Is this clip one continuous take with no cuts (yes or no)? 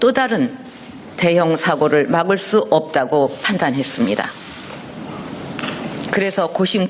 yes